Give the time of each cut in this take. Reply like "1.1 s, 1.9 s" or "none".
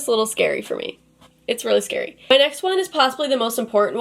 2.2 s